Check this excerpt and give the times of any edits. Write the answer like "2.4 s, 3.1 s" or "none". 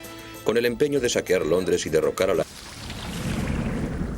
none